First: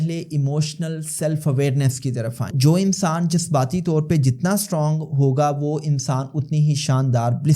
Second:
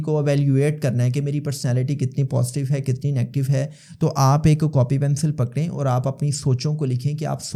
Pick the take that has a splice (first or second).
first